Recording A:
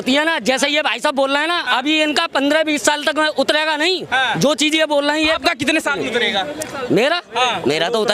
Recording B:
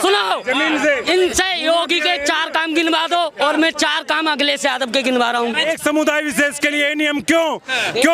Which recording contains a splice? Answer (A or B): B